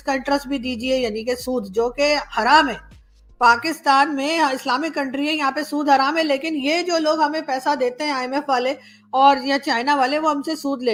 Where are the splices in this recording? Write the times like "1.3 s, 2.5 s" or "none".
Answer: none